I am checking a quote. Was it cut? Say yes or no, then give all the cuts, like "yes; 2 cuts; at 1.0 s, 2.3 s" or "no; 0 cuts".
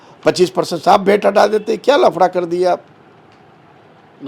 no; 0 cuts